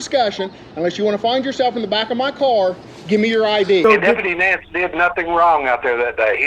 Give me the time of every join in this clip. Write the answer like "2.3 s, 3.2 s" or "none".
3.8 s